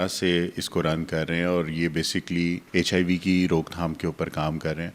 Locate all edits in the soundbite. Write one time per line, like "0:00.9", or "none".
0:02.6